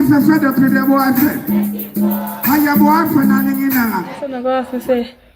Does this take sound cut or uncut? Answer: cut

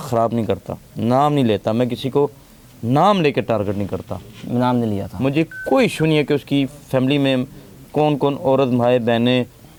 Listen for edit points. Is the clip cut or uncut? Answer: uncut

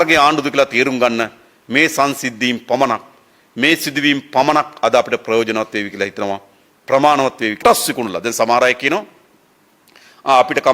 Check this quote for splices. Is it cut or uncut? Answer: cut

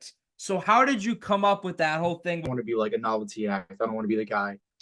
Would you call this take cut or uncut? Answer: cut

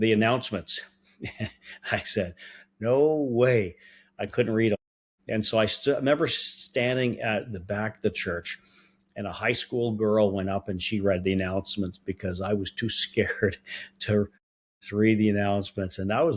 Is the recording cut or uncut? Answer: uncut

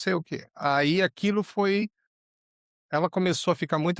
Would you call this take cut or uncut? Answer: uncut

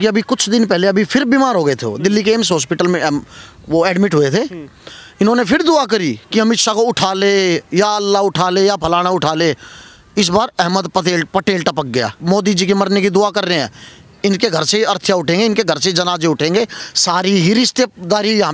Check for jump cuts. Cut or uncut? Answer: cut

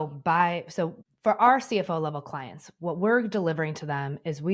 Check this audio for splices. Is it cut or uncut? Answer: cut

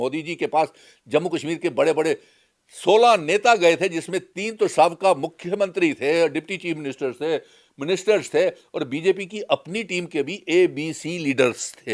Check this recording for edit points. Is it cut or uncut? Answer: uncut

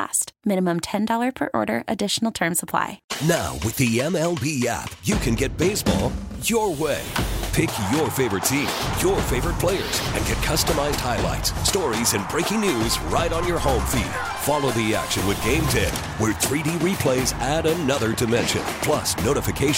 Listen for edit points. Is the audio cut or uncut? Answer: cut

